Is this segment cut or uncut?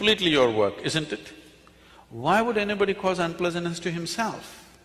uncut